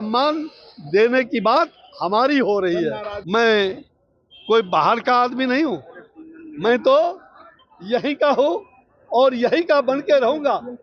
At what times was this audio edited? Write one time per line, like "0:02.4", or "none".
0:03.1